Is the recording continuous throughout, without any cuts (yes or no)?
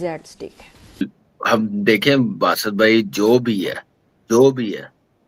no